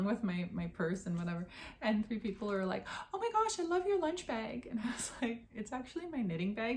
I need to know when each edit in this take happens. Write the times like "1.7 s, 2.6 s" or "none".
none